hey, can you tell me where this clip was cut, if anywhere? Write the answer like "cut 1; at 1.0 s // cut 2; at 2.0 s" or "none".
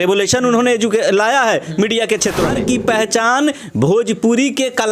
cut 1; at 2.5 s